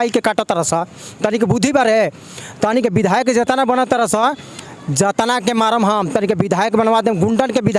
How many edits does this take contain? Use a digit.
0